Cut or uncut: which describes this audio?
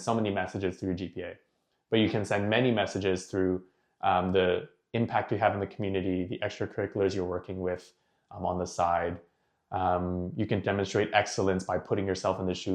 uncut